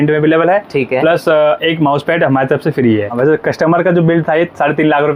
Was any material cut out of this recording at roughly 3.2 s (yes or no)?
yes